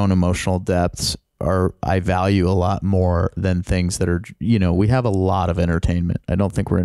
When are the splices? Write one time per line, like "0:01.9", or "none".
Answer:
none